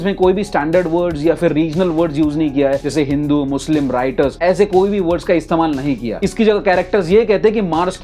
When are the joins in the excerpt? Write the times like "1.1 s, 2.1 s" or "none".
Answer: none